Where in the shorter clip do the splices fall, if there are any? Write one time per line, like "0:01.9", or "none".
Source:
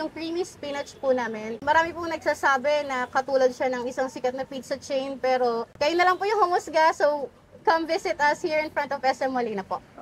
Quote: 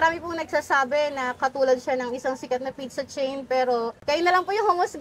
none